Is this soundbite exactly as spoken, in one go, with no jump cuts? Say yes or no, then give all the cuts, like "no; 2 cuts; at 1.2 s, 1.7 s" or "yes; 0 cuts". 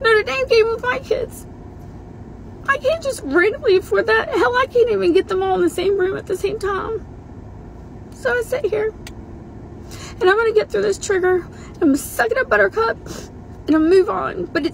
yes; 0 cuts